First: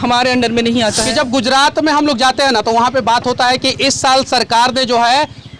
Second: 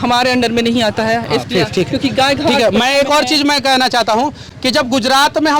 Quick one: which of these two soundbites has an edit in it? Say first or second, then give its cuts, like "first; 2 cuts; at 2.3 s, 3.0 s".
first; 1 cut; at 1.0 s